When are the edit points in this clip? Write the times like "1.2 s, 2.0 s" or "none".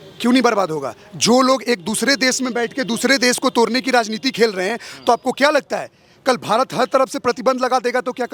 none